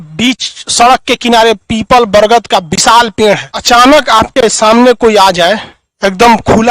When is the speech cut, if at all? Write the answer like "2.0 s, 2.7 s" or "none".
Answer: 3.5 s